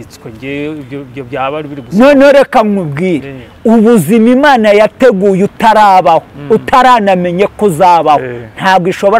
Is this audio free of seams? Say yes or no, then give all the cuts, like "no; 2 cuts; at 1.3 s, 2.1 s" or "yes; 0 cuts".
yes; 0 cuts